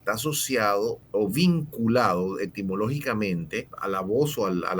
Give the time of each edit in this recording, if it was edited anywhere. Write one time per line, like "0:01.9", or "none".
0:01.0
0:03.7